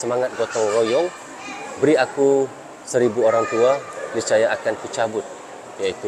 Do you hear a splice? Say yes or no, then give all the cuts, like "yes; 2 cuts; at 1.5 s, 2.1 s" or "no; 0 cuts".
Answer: no; 0 cuts